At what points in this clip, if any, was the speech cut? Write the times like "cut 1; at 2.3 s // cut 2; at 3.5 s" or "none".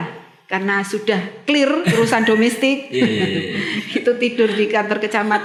none